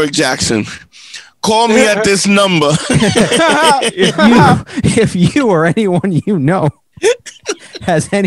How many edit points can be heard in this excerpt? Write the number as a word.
zero